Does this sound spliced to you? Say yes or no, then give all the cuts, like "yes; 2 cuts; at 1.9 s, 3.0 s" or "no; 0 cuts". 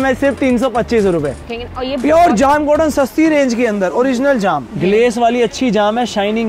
yes; 2 cuts; at 1.5 s, 4.7 s